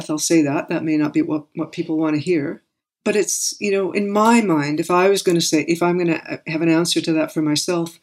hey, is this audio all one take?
yes; 0 cuts

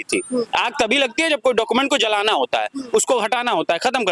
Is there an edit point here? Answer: no; 0 cuts

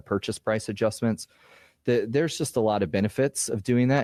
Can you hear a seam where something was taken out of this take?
no; 0 cuts

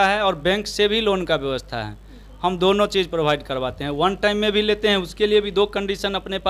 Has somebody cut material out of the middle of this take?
no; 0 cuts

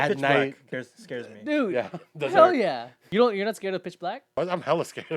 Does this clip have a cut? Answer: yes; 2 cuts; at 2.9 s, 4.4 s

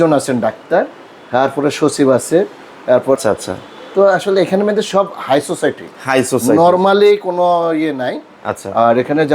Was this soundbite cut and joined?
no; 0 cuts

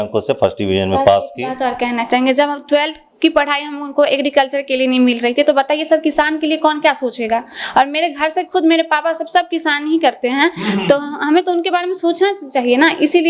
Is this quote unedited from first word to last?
yes; 0 cuts

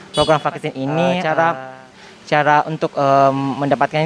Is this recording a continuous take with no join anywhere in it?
no; 1 cut; at 1.1 s

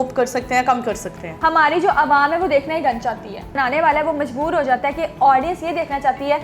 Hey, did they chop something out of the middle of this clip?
yes; 2 cuts; at 1.2 s, 3.6 s

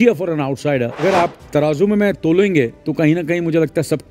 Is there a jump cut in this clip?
yes; 2 cuts; at 1.0 s, 2.8 s

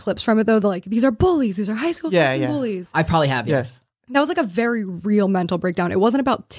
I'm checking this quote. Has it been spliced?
no; 0 cuts

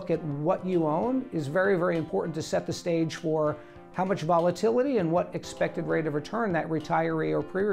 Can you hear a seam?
no; 0 cuts

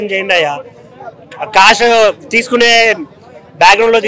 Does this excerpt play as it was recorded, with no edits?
yes; 0 cuts

